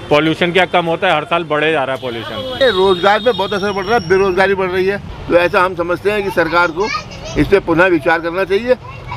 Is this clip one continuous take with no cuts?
no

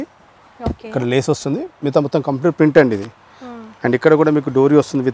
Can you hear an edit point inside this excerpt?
no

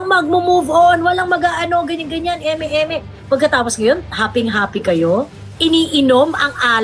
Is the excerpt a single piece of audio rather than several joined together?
yes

